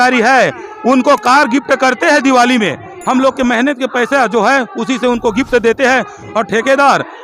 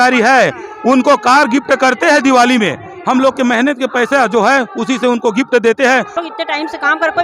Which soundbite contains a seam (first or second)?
second